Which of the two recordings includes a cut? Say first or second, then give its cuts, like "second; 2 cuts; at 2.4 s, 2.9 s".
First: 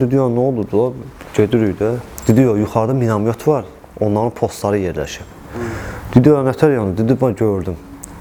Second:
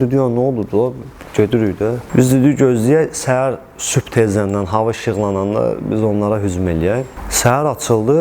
second; 2 cuts; at 2.0 s, 7.2 s